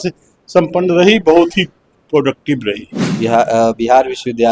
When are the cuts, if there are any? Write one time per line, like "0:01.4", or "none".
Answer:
0:03.1

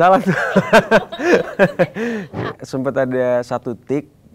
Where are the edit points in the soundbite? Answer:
0:02.6

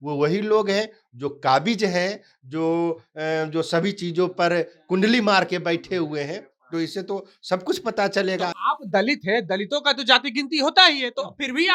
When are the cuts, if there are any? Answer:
none

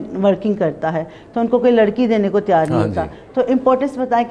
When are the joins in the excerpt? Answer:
none

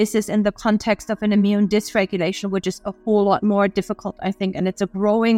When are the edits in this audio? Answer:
none

